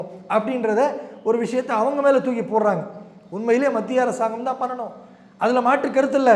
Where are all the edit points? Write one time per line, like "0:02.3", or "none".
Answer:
none